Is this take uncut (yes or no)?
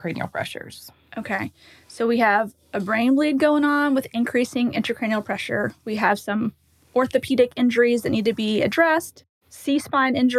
yes